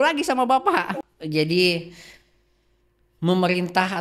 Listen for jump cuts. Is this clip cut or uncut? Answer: cut